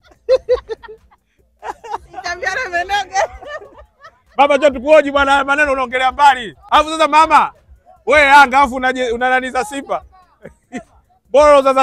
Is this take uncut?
no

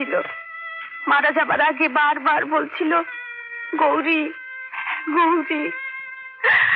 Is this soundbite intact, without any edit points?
yes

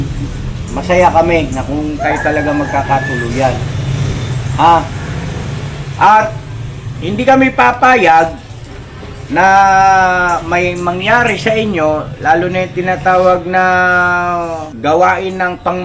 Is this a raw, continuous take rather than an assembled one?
no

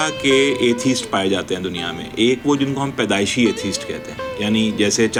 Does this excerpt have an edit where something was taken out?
no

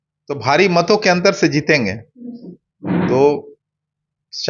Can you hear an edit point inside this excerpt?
no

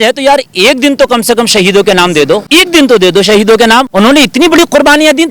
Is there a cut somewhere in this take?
yes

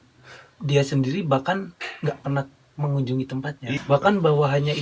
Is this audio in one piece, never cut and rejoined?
no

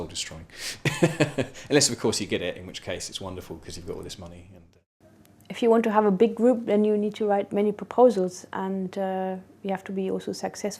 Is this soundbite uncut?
no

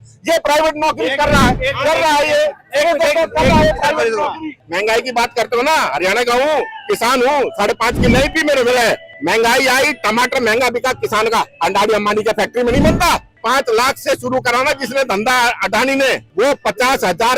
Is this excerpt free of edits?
no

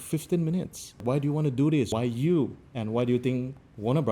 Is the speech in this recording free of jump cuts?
no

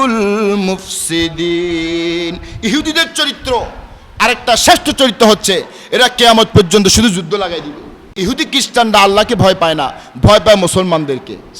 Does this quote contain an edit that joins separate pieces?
yes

